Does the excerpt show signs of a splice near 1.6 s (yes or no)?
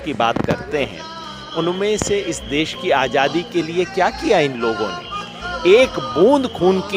no